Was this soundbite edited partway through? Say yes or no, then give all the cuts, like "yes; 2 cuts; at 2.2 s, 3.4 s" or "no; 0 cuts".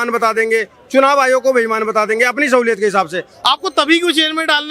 yes; 1 cut; at 3.3 s